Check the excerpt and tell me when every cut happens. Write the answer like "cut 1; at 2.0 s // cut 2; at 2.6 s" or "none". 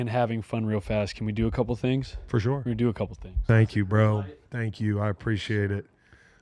cut 1; at 3.4 s